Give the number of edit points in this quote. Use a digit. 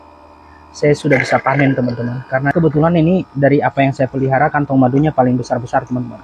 1